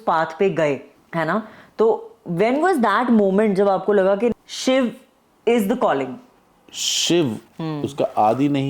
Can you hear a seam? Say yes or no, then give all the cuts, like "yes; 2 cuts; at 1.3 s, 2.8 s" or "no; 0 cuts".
yes; 3 cuts; at 0.9 s, 4.3 s, 6.8 s